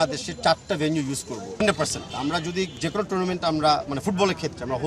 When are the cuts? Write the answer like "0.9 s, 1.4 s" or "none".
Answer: 1.4 s